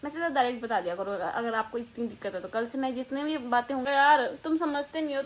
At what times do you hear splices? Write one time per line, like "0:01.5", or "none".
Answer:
0:03.9